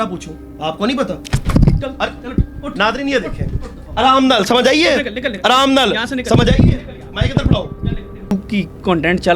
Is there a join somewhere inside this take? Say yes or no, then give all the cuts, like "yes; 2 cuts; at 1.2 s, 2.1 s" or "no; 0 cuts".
yes; 1 cut; at 8.3 s